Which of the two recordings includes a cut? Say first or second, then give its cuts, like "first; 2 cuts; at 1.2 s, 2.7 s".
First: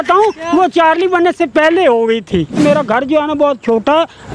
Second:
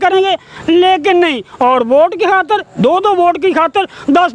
first; 1 cut; at 2.6 s